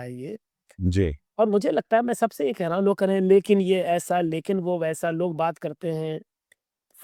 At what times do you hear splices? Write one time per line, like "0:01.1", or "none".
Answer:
none